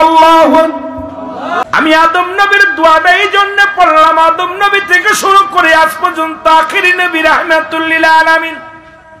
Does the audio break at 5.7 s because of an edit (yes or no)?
no